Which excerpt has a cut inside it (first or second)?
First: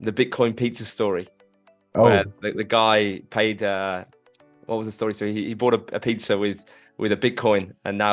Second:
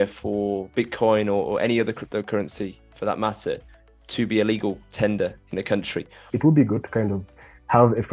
second